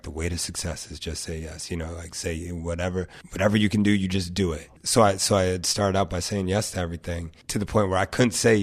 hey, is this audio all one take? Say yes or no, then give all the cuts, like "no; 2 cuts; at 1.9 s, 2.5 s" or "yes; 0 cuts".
no; 3 cuts; at 3.2 s, 4.7 s, 7.3 s